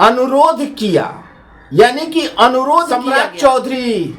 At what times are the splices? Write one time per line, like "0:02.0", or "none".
0:03.1